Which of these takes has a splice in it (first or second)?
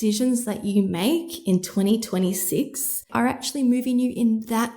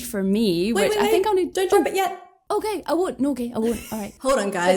first